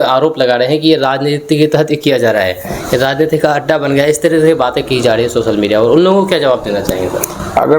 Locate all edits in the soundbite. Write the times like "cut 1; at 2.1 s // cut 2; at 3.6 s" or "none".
none